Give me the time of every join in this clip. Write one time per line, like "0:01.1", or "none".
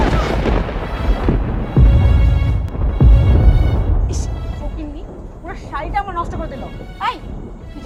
none